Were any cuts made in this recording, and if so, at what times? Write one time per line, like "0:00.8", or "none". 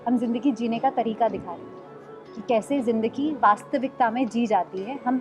none